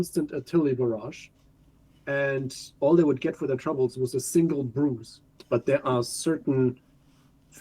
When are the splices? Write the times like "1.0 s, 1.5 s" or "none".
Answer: 5.4 s